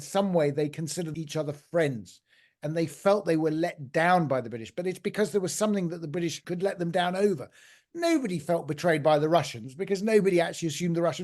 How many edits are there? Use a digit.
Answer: 2